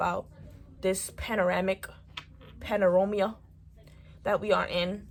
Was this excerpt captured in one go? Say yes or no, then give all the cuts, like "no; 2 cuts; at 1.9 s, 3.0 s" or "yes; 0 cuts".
yes; 0 cuts